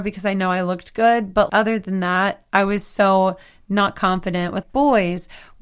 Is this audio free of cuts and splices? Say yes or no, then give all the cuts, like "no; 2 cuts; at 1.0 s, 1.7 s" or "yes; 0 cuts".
no; 2 cuts; at 1.5 s, 4.6 s